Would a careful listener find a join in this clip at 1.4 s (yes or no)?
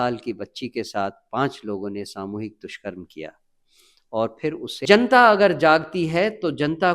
no